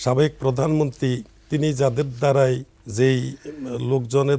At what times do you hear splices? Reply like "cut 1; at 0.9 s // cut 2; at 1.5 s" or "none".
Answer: cut 1; at 2.8 s